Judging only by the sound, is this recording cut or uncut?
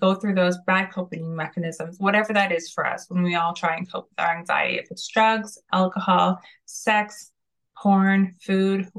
uncut